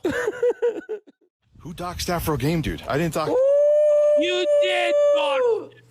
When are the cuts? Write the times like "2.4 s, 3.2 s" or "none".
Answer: 1.7 s